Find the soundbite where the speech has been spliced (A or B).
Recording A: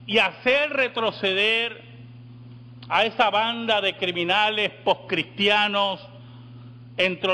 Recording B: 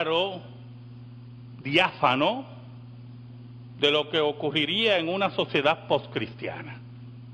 A